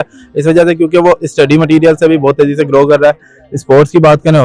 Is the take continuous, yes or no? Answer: yes